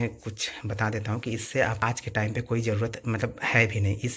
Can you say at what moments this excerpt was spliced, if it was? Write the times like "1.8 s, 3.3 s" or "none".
1.8 s